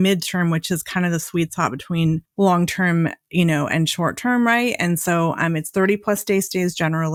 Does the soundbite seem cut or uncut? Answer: uncut